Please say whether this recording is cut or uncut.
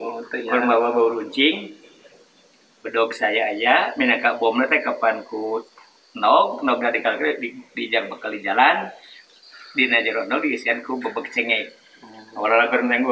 uncut